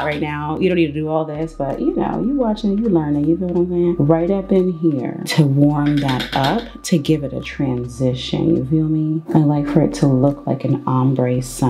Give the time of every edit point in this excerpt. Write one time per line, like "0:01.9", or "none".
none